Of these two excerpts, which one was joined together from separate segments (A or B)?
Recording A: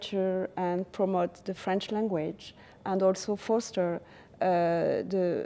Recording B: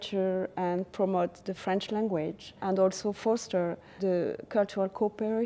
B